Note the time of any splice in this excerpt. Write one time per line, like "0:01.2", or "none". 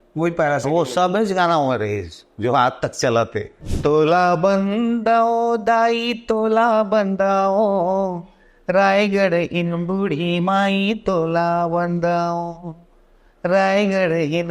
0:03.6